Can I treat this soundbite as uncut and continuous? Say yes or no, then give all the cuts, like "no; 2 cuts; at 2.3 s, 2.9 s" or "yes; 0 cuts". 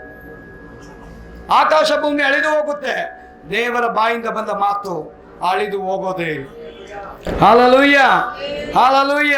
yes; 0 cuts